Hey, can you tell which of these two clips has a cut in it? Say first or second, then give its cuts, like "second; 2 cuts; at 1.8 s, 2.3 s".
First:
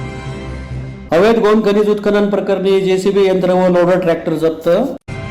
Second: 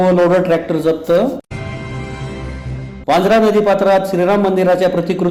first; 1 cut; at 1.0 s